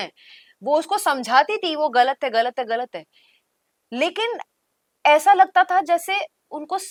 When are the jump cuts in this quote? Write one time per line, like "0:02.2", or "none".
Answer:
none